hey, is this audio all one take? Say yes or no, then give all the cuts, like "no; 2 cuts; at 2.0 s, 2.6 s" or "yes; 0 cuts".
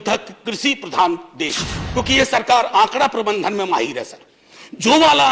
no; 1 cut; at 1.8 s